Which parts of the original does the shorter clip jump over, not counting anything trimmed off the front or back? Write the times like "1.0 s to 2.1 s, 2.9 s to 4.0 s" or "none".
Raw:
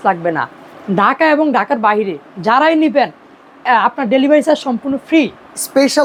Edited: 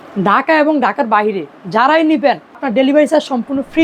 3.4 s to 4.0 s